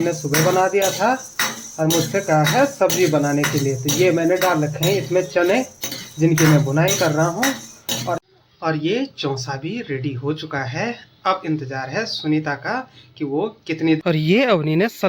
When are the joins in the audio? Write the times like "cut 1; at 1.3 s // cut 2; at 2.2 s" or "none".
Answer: cut 1; at 8.2 s // cut 2; at 14.0 s